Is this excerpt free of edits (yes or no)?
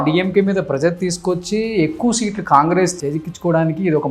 no